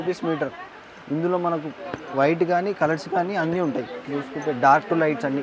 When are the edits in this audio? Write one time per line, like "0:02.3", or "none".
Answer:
0:04.0